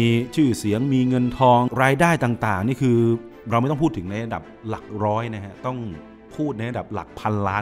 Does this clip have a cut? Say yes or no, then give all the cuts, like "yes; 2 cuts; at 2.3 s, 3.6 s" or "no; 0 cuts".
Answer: yes; 1 cut; at 1.7 s